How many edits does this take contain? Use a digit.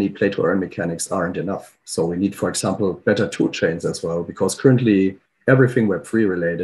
0